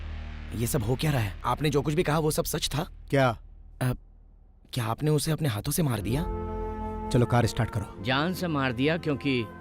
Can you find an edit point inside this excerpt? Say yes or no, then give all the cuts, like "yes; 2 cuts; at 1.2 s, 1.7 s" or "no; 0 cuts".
yes; 1 cut; at 1.3 s